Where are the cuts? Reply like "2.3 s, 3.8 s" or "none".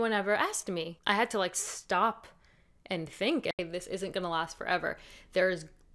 0.9 s, 3.6 s